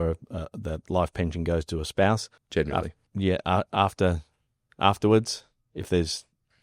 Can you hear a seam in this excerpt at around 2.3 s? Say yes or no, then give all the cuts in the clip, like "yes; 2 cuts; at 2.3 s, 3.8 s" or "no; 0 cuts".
yes; 1 cut; at 2.3 s